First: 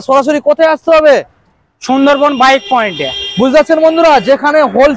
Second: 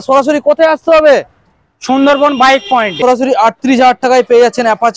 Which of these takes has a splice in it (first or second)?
second